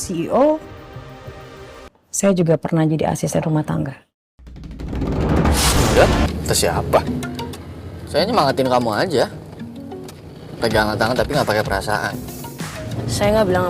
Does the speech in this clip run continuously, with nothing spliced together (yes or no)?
no